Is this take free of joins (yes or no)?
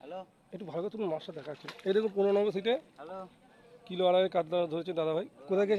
yes